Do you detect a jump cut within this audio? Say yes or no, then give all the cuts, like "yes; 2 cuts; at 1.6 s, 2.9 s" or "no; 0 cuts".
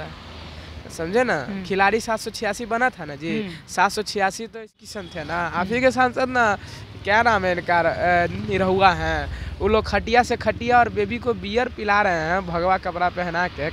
yes; 1 cut; at 4.8 s